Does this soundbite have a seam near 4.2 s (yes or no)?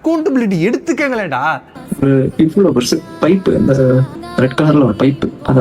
yes